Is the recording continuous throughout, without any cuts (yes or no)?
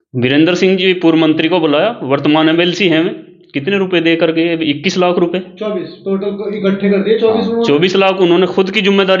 yes